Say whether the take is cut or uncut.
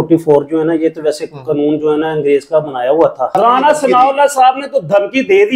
cut